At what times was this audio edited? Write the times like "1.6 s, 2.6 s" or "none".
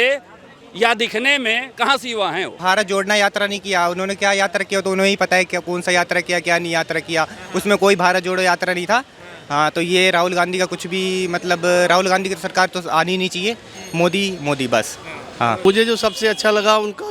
2.6 s, 15.6 s